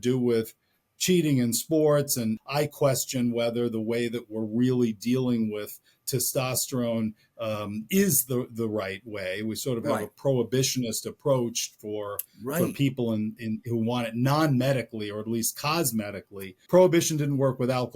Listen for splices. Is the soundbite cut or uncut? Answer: cut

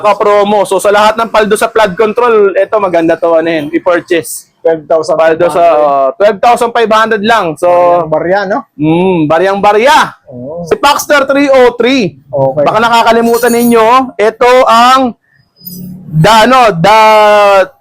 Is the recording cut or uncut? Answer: cut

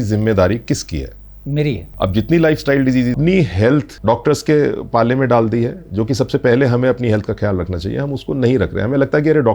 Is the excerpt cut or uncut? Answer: cut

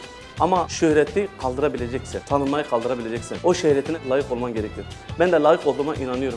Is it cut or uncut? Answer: uncut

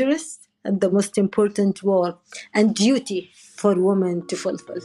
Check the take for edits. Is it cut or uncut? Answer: uncut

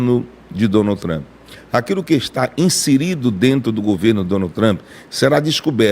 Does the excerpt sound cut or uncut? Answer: uncut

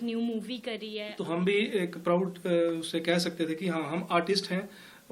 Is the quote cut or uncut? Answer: cut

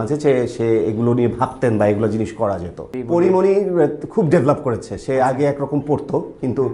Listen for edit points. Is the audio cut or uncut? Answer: cut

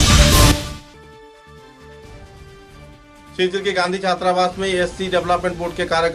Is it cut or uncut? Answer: uncut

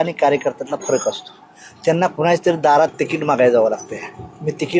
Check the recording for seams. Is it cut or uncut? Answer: uncut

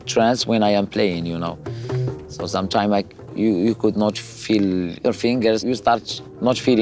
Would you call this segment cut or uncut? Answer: uncut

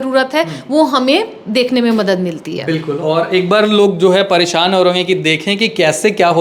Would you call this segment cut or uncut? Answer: uncut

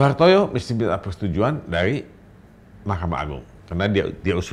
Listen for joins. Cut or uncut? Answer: uncut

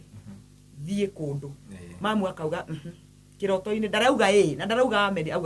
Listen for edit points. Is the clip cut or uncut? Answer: uncut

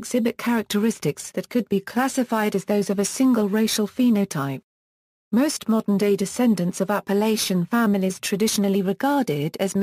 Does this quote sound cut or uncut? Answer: cut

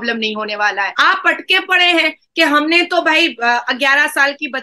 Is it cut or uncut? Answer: cut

